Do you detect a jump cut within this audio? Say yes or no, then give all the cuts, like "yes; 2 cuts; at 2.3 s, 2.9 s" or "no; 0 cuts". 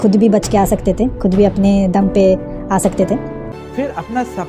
yes; 1 cut; at 3.5 s